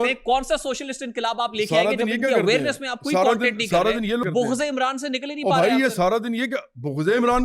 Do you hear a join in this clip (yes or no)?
yes